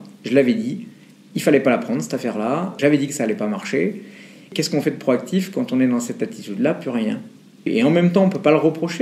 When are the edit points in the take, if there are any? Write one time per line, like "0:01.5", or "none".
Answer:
0:07.7